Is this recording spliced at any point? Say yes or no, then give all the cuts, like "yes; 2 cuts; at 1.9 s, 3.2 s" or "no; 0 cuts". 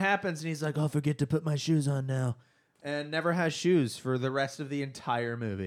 no; 0 cuts